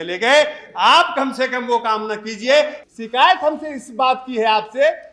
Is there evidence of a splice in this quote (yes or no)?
yes